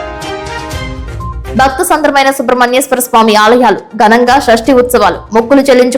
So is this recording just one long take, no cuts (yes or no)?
no